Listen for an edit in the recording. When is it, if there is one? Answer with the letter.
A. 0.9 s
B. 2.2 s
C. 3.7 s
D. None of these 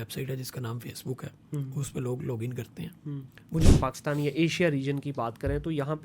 C